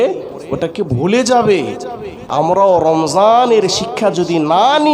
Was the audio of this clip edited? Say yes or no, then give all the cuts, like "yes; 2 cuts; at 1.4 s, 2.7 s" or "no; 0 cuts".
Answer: yes; 1 cut; at 2.2 s